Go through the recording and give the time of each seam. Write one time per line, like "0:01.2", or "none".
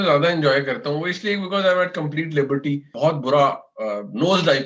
0:02.9